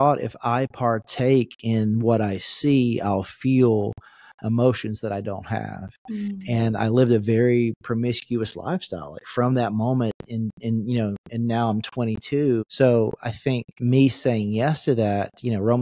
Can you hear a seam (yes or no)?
yes